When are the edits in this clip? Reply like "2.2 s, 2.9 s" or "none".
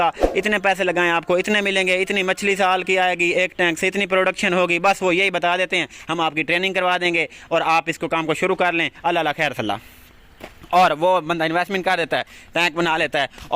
none